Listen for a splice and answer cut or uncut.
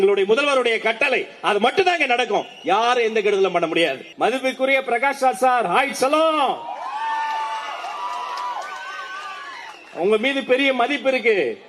cut